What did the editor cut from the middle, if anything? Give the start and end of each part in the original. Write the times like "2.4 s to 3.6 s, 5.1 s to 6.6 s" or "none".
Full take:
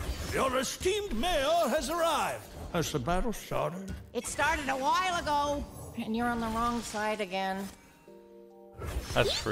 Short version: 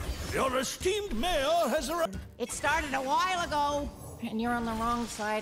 2.1 s to 3.8 s